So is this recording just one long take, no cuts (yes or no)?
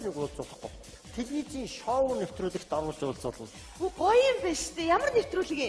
no